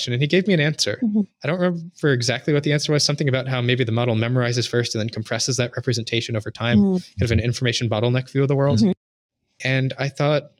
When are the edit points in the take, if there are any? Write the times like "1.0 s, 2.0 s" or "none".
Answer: none